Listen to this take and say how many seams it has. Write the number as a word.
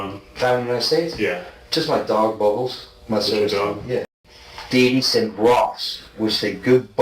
one